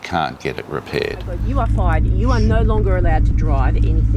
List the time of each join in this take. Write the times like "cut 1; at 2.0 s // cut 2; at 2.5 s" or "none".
cut 1; at 1.4 s